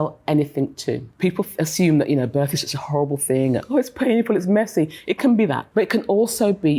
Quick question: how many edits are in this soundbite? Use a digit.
2